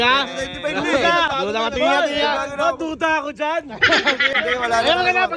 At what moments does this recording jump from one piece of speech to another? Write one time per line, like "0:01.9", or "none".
none

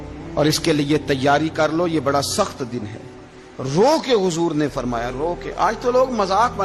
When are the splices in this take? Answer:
none

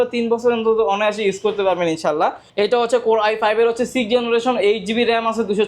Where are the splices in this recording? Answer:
0:02.5

